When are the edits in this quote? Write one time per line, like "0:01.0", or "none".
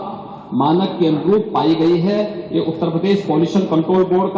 none